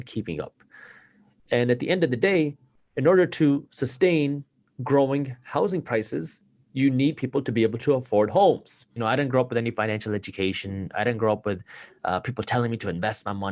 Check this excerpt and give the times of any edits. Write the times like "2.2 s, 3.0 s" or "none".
8.9 s